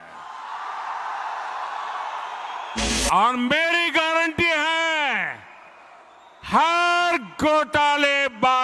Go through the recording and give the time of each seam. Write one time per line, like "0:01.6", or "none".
0:02.8